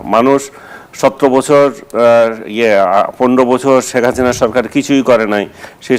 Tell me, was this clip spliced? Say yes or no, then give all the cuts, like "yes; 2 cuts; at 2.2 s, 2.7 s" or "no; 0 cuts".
no; 0 cuts